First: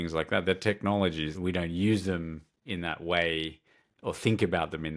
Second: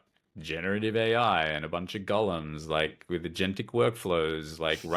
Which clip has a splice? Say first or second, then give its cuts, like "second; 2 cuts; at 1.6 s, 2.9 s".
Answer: first; 1 cut; at 1.3 s